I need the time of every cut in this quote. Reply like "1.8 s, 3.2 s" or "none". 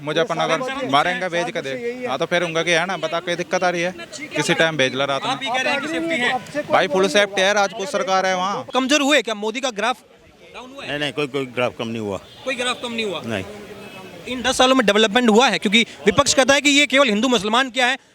8.6 s